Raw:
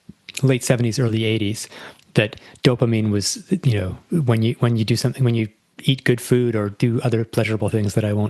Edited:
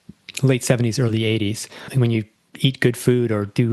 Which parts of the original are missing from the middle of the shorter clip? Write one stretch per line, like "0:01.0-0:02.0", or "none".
0:01.9-0:05.2